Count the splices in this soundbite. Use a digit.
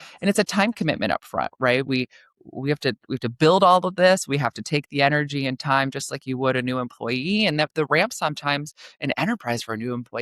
0